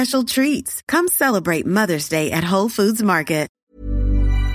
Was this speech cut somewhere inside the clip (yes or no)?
yes